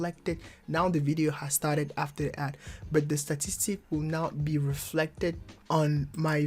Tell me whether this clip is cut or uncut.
cut